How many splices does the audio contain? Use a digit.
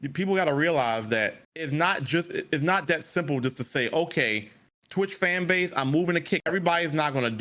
2